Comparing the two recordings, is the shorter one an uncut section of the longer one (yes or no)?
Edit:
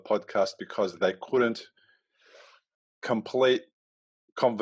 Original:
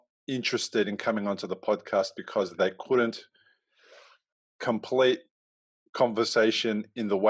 yes